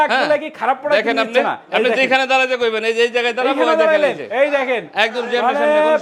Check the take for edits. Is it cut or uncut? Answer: uncut